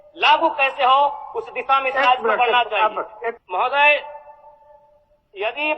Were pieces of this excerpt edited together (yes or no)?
yes